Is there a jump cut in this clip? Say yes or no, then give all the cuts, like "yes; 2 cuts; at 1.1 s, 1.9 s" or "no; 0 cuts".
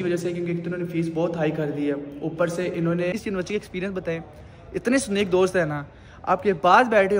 yes; 1 cut; at 3.2 s